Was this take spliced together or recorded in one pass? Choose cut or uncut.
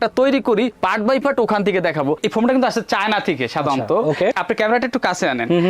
cut